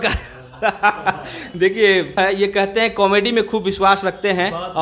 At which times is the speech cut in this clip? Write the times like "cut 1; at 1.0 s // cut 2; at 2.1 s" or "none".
cut 1; at 2.2 s